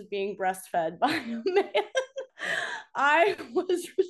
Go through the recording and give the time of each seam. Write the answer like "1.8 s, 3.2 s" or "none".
2.2 s